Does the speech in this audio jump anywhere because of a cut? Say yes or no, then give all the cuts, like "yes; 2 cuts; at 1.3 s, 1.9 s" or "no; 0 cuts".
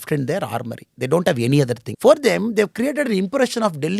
yes; 1 cut; at 1.9 s